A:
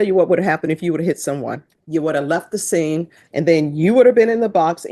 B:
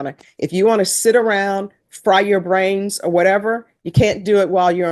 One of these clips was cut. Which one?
A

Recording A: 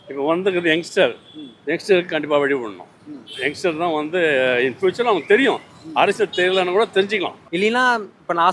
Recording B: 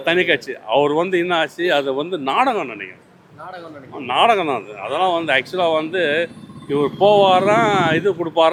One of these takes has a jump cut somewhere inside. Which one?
A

